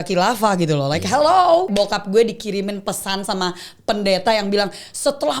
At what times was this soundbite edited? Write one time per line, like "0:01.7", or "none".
0:01.7